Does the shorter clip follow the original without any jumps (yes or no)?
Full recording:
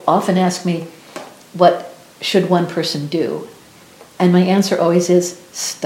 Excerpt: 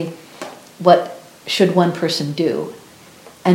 yes